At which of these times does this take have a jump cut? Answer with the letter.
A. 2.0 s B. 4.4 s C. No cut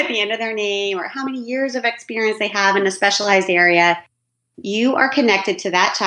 C